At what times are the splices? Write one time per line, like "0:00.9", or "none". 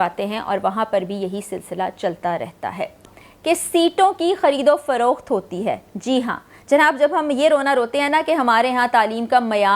0:03.1

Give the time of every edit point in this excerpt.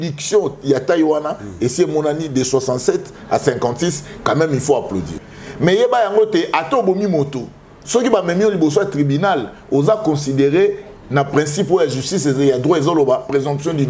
0:05.1

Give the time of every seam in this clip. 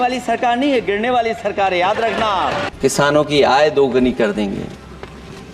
0:02.7

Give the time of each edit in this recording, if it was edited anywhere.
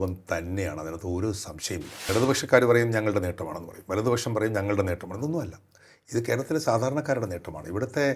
0:02.1

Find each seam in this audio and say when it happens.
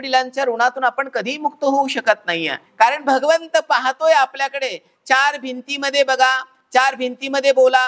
0:02.6

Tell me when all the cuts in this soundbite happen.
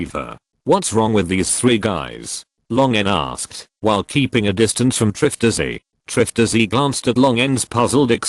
0:01.2

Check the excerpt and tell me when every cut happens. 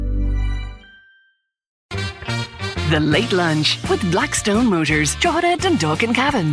0:01.9

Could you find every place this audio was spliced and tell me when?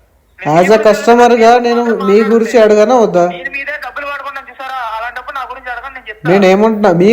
none

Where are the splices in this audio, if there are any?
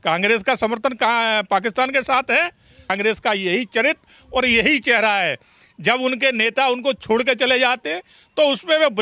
0:02.9

